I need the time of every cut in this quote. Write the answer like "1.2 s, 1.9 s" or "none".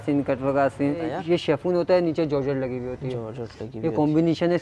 1.1 s